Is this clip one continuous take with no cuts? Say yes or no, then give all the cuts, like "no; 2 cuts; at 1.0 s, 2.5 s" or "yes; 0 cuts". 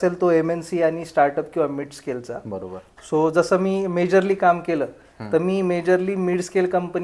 yes; 0 cuts